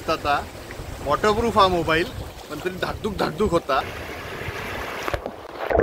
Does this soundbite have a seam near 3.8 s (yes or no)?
yes